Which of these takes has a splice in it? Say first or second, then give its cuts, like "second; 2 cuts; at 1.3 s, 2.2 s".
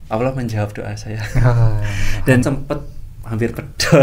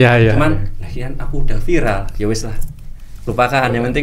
first; 1 cut; at 2.4 s